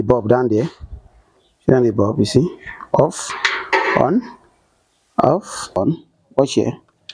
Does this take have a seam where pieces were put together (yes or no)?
yes